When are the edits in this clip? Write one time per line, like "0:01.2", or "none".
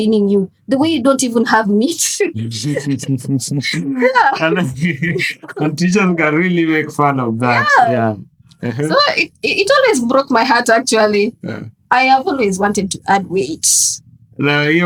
none